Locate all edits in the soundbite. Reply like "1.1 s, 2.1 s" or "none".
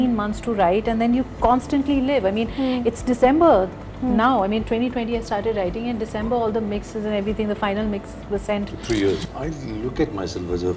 9.3 s